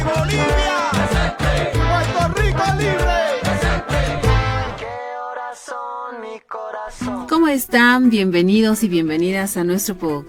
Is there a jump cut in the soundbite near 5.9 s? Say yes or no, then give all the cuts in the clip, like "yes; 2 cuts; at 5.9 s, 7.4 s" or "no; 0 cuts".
no; 0 cuts